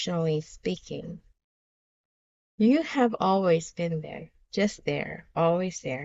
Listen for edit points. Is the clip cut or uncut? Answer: uncut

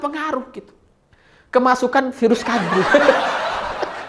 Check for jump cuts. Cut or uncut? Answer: cut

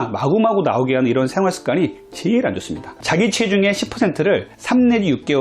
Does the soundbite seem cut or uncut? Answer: cut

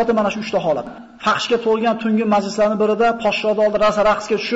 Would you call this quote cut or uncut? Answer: cut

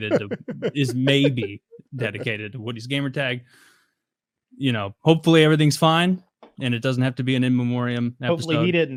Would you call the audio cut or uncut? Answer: uncut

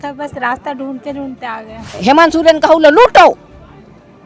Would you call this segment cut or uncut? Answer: cut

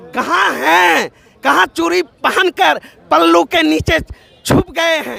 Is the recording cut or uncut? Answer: uncut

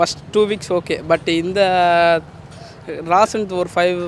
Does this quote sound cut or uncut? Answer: uncut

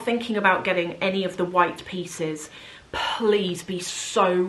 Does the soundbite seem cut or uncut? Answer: uncut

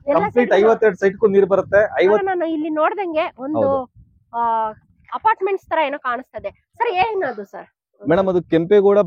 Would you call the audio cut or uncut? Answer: cut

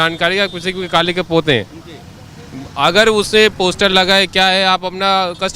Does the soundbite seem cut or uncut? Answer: uncut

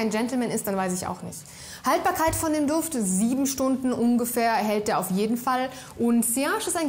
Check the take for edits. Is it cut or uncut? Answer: uncut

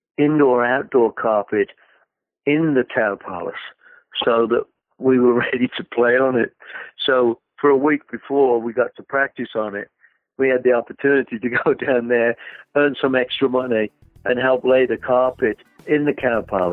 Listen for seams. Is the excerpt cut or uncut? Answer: cut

